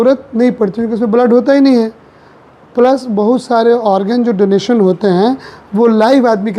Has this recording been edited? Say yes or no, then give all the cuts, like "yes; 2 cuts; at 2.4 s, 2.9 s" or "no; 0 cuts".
no; 0 cuts